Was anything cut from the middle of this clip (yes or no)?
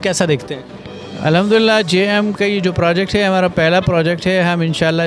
no